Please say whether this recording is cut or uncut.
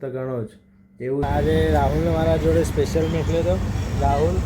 cut